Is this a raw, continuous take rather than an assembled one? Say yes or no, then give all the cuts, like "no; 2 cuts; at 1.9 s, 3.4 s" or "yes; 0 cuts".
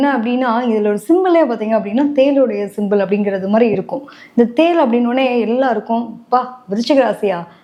yes; 0 cuts